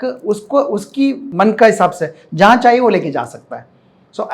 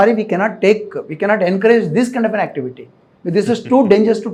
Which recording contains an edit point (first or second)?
first